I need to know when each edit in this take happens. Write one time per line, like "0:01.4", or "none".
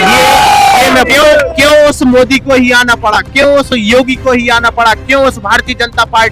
0:01.1